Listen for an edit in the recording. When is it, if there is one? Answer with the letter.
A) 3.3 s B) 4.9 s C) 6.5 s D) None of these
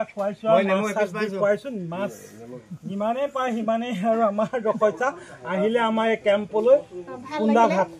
D